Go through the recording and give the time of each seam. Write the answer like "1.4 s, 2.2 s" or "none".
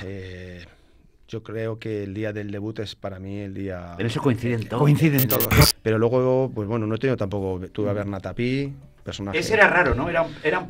5.6 s